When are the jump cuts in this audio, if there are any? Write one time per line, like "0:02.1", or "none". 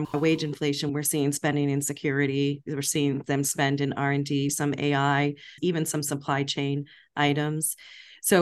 0:00.9
0:04.5
0:05.6